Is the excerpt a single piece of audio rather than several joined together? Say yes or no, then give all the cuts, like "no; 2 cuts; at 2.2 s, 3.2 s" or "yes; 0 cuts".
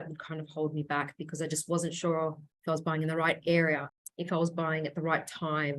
no; 2 cuts; at 2.5 s, 3.9 s